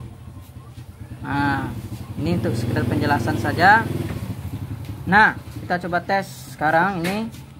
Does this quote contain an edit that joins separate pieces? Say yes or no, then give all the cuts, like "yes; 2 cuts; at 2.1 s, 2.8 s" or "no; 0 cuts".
no; 0 cuts